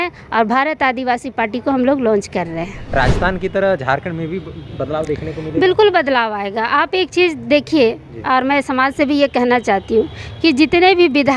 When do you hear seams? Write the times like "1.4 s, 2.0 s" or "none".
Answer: 2.8 s